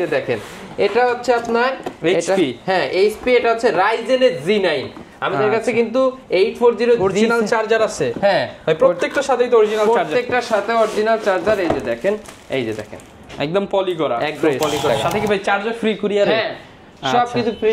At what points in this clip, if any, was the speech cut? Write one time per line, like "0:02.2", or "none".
0:14.9